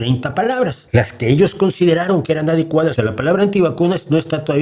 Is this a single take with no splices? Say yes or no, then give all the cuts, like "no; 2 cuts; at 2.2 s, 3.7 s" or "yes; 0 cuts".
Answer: no; 2 cuts; at 0.8 s, 3.0 s